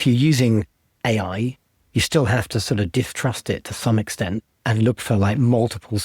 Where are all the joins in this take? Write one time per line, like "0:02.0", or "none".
0:04.6